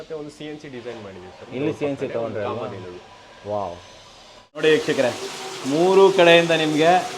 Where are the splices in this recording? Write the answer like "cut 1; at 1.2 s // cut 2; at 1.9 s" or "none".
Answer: cut 1; at 4.6 s